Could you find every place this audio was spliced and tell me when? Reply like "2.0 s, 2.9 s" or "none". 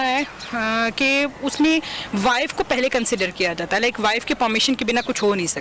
none

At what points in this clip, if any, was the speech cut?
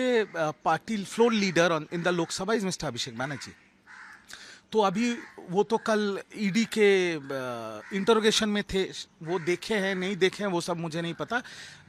none

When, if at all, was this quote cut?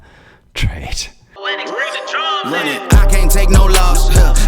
1.4 s

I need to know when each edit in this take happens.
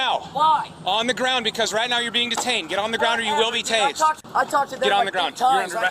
4.2 s

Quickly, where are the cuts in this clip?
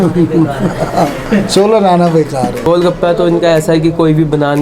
2.6 s

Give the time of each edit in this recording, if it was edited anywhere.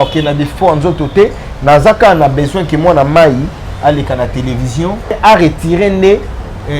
5.1 s

